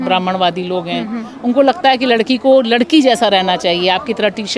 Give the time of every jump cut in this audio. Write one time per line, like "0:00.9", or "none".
none